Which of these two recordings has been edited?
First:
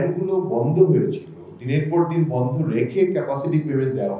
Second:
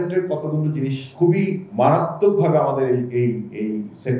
second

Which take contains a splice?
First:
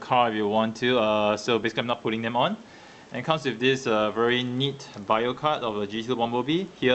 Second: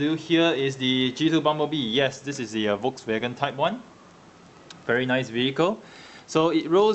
first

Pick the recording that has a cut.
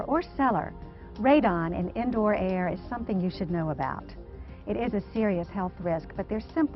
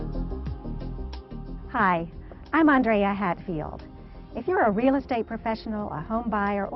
first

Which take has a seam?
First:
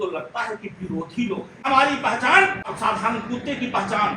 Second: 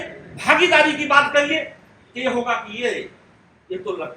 first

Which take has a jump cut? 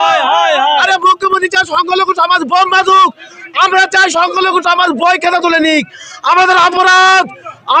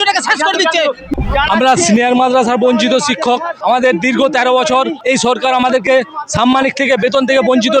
second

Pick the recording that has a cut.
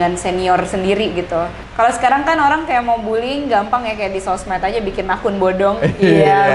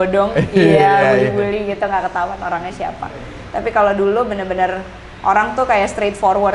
first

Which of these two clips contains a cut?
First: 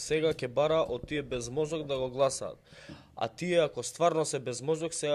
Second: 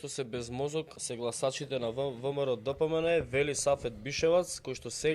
second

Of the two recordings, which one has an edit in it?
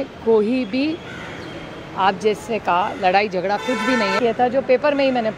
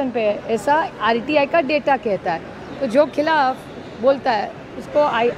first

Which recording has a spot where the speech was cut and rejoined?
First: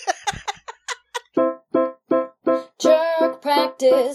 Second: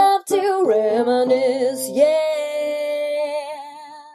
first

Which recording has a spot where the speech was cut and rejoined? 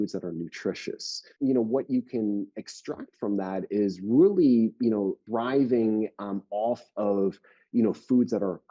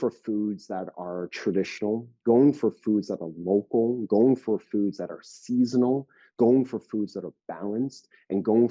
first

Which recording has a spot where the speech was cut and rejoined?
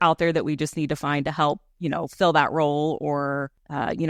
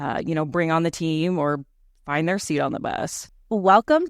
second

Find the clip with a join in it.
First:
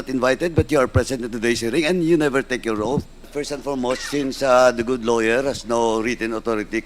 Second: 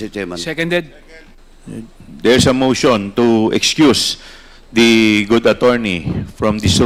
first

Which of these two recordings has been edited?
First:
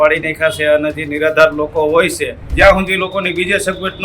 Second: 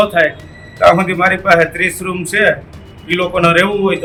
first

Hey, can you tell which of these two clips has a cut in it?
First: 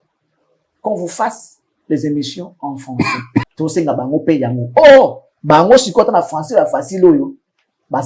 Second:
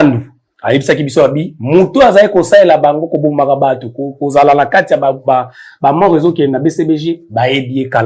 first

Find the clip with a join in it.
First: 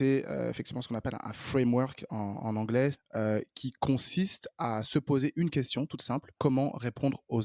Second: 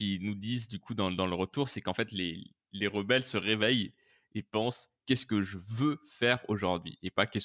first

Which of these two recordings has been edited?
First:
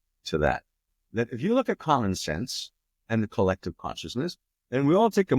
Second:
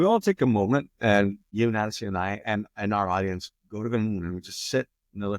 second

